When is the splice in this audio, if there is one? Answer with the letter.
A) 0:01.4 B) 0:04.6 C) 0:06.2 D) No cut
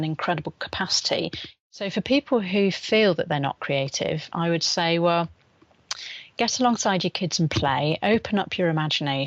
A